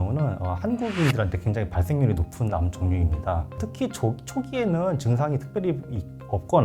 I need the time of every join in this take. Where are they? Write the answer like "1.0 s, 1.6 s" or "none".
3.6 s